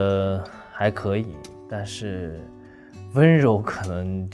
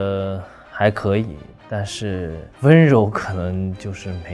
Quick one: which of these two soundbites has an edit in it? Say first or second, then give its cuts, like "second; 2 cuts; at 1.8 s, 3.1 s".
second; 1 cut; at 2.4 s